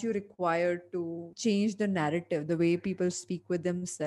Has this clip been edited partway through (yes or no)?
yes